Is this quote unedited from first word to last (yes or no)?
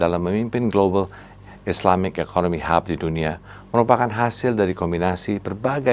yes